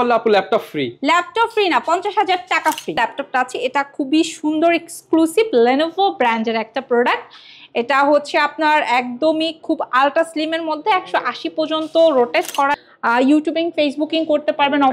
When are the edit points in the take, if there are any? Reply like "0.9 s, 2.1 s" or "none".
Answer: 3.0 s, 12.8 s

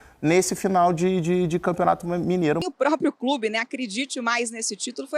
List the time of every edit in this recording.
2.6 s

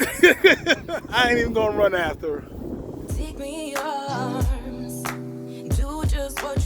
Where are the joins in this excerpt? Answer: 0.9 s, 3.1 s

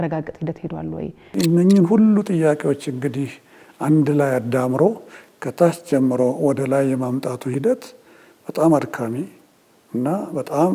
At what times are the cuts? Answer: 1.3 s

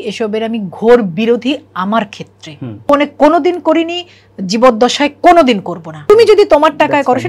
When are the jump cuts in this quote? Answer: 2.9 s, 5.9 s

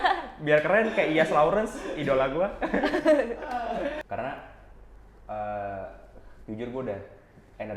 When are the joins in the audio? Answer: 4.0 s

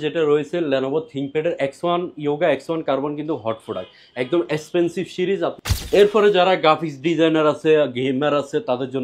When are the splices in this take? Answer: 5.6 s

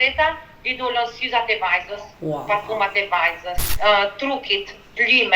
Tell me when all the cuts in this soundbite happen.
3.7 s

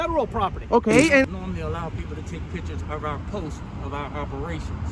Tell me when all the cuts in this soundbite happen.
1.2 s

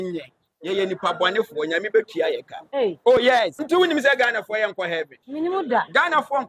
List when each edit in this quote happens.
3.6 s, 5.2 s

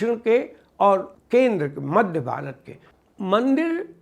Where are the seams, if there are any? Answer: 1.2 s

